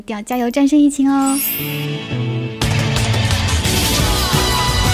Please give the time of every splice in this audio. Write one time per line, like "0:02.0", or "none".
0:01.5